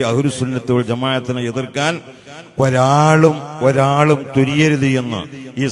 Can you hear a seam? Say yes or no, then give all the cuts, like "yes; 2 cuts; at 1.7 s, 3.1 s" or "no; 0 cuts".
no; 0 cuts